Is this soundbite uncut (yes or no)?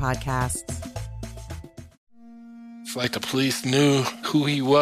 no